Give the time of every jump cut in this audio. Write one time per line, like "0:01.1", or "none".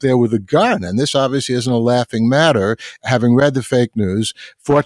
none